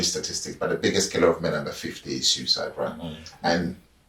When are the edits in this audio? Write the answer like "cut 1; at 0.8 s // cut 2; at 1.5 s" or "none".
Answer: none

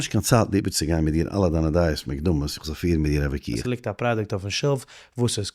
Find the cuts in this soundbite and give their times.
cut 1; at 3.6 s

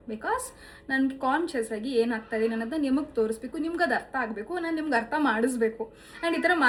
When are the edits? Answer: none

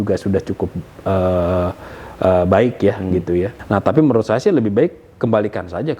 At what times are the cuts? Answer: cut 1; at 3.6 s

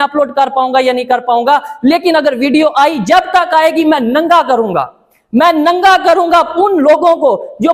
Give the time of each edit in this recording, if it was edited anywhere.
none

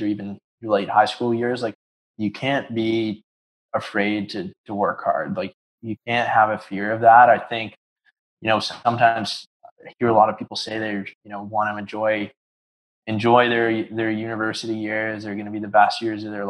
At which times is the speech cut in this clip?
cut 1; at 1.7 s // cut 2; at 5.5 s

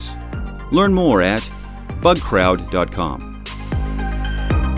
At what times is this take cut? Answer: cut 1; at 3.4 s

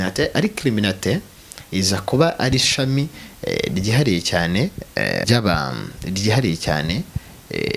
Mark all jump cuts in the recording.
cut 1; at 5.2 s

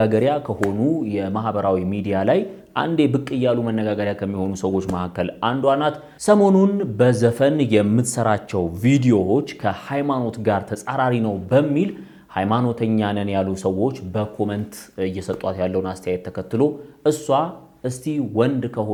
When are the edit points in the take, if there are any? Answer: none

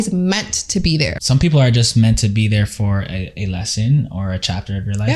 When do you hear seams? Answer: cut 1; at 1.1 s

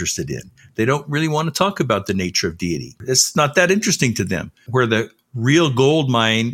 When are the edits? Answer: cut 1; at 3.0 s // cut 2; at 4.6 s

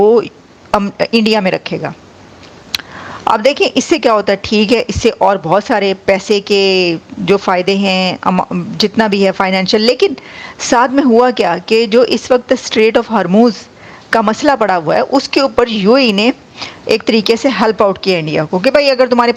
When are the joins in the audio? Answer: none

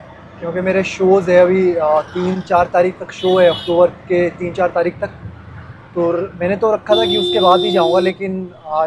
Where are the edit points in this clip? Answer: none

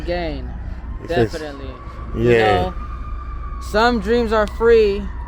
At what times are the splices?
none

